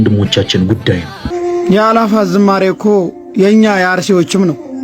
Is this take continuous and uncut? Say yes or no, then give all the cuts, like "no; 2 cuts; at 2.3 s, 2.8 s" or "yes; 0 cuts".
no; 1 cut; at 1.3 s